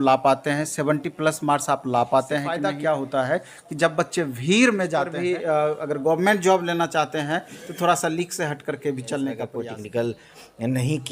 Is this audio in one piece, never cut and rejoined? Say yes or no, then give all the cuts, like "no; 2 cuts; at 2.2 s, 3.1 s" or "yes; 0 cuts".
no; 3 cuts; at 2.5 s, 5.1 s, 9.5 s